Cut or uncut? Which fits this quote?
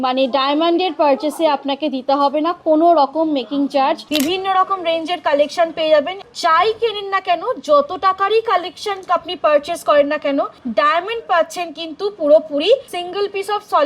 cut